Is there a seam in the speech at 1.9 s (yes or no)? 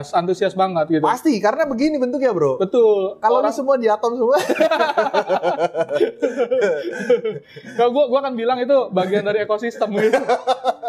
no